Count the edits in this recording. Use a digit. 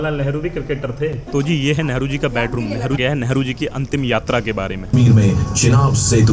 3